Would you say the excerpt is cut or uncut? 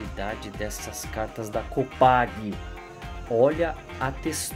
uncut